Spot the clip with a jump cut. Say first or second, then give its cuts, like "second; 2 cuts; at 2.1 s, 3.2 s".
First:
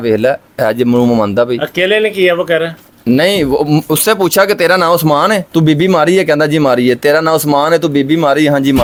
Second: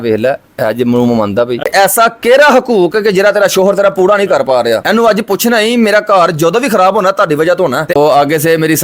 second; 2 cuts; at 1.7 s, 7.9 s